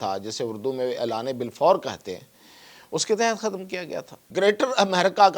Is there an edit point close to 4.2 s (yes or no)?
yes